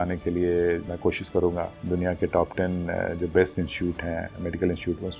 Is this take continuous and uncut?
yes; 0 cuts

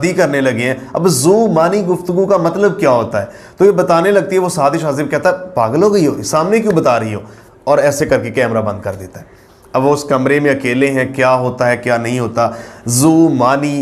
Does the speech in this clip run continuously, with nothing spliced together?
yes; 0 cuts

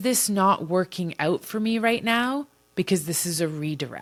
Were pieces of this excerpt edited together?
no; 0 cuts

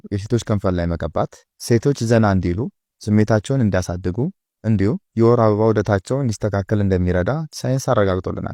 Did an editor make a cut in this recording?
no; 0 cuts

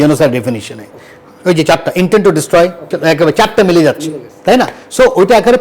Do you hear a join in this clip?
yes; 1 cut; at 2.9 s

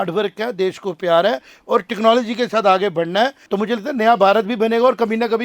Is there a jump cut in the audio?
yes; 1 cut; at 3.4 s

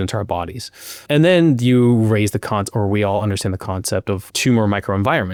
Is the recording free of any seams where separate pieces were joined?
yes; 0 cuts

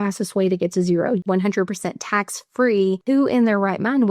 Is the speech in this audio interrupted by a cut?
yes; 2 cuts; at 1.2 s, 3.0 s

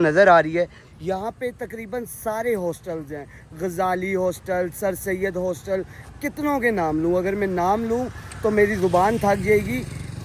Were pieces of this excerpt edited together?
no; 0 cuts

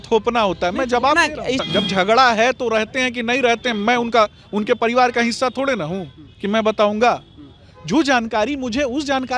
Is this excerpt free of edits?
no; 1 cut; at 1.6 s

